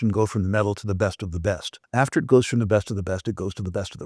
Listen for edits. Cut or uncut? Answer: uncut